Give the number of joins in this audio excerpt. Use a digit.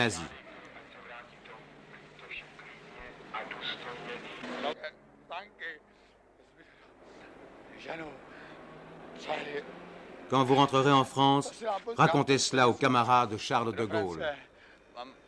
0